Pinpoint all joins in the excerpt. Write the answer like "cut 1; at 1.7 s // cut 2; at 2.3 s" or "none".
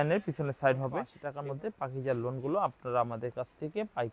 cut 1; at 1.2 s